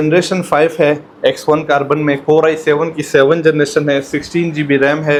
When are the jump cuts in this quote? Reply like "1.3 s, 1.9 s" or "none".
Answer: none